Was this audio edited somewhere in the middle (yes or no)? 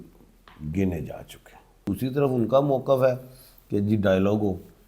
yes